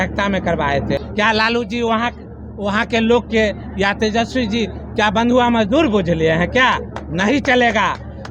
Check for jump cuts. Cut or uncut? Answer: cut